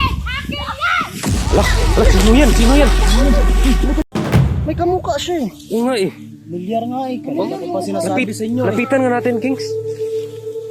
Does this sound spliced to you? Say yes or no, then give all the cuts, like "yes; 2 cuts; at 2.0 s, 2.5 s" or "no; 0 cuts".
yes; 1 cut; at 4.0 s